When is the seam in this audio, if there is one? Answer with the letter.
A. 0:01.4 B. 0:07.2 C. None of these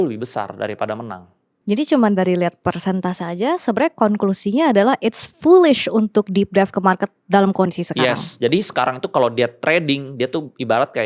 A